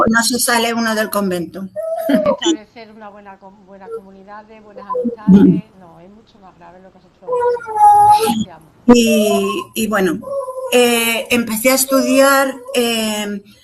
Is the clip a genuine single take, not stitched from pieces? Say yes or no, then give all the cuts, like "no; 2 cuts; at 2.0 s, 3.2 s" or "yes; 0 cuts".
yes; 0 cuts